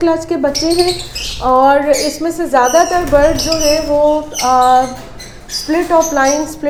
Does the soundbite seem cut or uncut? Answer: uncut